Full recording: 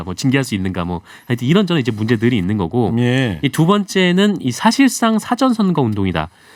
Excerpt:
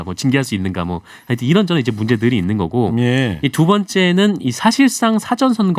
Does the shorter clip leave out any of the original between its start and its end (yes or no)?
no